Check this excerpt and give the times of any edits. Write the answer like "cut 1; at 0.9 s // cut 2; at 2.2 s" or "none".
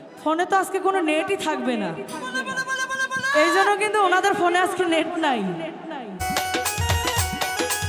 cut 1; at 6.2 s